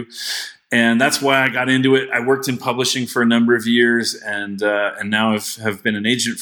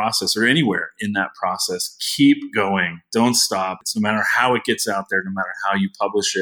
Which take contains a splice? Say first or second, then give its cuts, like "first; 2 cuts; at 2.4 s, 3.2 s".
second; 1 cut; at 3.8 s